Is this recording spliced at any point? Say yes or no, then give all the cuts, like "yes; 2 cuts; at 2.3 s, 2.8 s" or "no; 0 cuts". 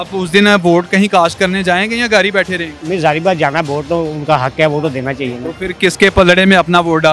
no; 0 cuts